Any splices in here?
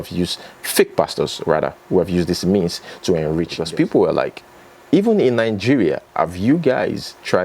yes; 1 cut; at 3.5 s

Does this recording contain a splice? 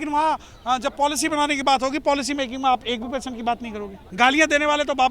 yes; 1 cut; at 4.0 s

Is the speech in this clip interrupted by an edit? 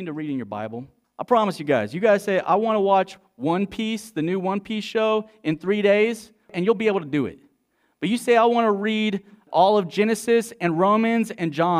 yes; 3 cuts; at 1.0 s, 6.5 s, 9.5 s

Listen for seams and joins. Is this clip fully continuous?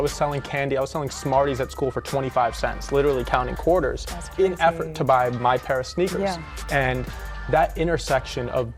yes; 0 cuts

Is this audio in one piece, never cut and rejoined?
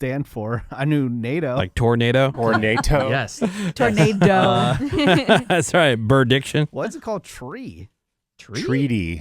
no; 2 cuts; at 1.7 s, 2.4 s

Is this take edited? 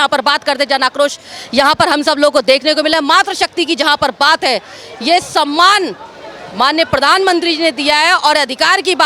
no; 0 cuts

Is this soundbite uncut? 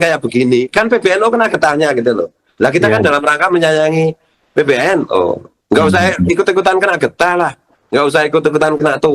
yes; 0 cuts

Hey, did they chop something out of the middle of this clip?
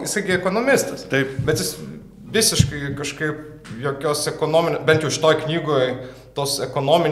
no; 0 cuts

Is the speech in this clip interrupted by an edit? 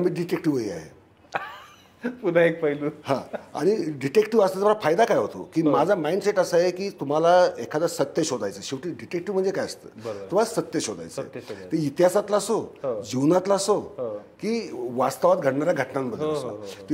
no; 0 cuts

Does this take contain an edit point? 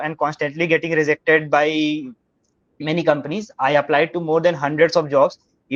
no; 0 cuts

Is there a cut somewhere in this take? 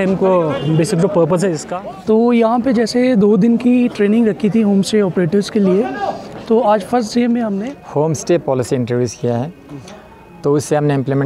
yes; 2 cuts; at 1.7 s, 7.6 s

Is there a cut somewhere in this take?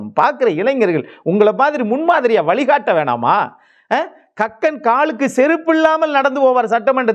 no; 0 cuts

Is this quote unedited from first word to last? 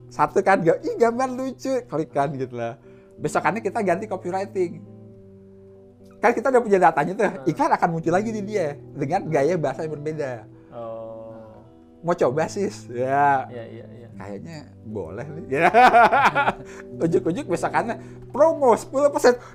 yes; 0 cuts

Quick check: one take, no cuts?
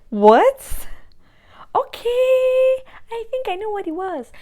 yes; 0 cuts

